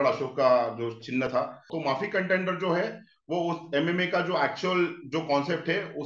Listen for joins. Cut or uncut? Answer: cut